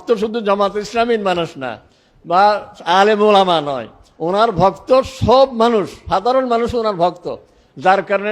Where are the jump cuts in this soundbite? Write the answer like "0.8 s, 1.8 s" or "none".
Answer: none